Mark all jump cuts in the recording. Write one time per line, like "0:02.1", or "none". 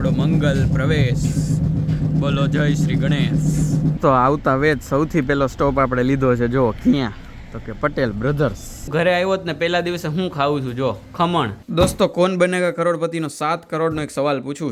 0:04.0
0:08.9
0:11.6